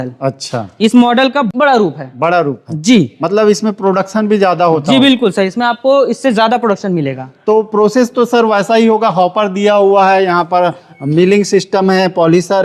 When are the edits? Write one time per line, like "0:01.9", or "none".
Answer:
none